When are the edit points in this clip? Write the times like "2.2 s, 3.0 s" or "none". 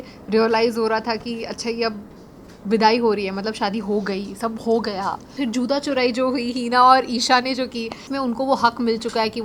5.3 s, 8.1 s